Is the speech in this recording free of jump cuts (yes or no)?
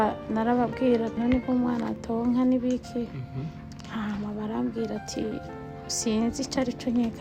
no